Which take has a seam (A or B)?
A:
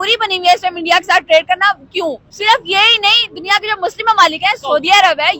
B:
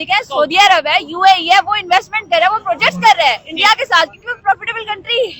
A